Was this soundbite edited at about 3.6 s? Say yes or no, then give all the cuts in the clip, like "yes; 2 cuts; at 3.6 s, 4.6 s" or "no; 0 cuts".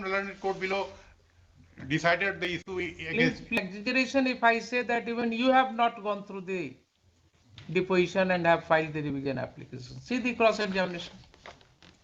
yes; 1 cut; at 3.6 s